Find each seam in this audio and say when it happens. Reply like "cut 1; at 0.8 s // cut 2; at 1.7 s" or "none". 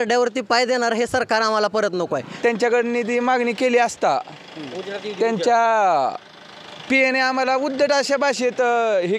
cut 1; at 2.2 s